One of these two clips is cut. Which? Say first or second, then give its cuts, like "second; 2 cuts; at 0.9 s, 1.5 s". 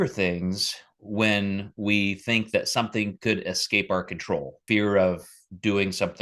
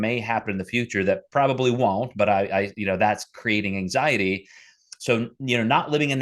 first; 1 cut; at 4.6 s